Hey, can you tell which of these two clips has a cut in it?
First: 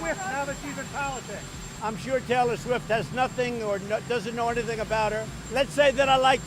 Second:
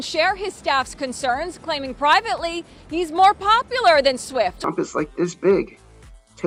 first; 1 cut; at 5.4 s

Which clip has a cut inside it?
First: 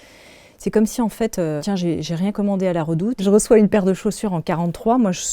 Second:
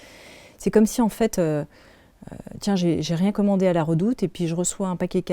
first; 2 cuts; at 1.6 s, 3.2 s

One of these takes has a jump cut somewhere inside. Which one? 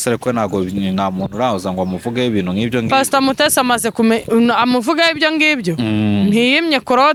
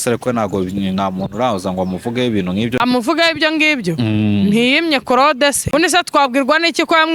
second; 2 cuts; at 2.8 s, 5.7 s

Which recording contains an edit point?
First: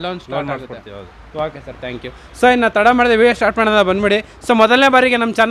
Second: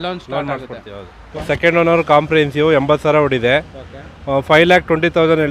second; 1 cut; at 1.2 s

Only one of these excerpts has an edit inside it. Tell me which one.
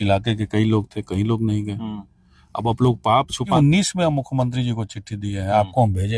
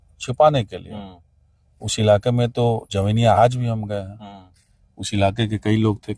first; 1 cut; at 3.5 s

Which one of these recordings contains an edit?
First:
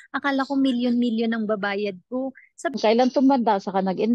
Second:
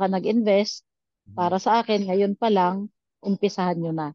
first; 1 cut; at 2.8 s

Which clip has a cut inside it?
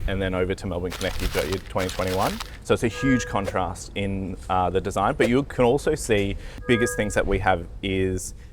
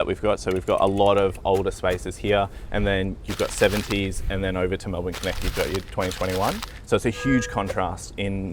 first; 1 cut; at 6.5 s

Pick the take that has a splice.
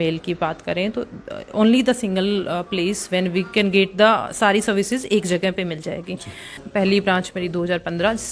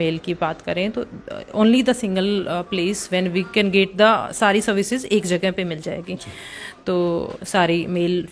first; 1 cut; at 6.6 s

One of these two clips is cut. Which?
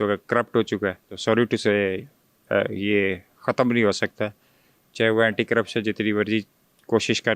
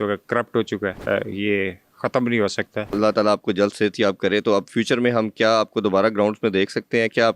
second; 2 cuts; at 1.0 s, 3.0 s

